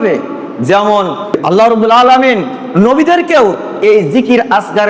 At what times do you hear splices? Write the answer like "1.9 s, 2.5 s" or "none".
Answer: 1.4 s